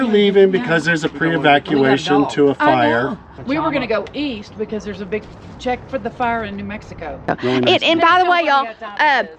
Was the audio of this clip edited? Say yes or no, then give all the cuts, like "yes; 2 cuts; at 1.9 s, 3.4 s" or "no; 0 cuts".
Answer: yes; 2 cuts; at 3.4 s, 7.2 s